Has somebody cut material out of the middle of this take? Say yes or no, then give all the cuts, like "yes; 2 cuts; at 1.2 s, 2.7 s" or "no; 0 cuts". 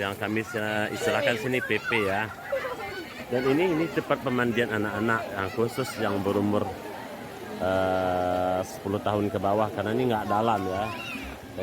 no; 0 cuts